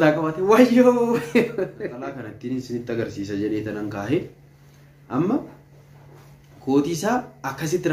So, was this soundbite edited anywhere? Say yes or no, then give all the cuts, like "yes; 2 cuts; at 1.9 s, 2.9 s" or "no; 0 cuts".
yes; 1 cut; at 2.3 s